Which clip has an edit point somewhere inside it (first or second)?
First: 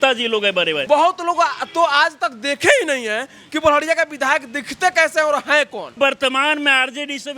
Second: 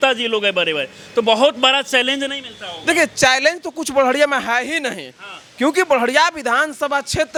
first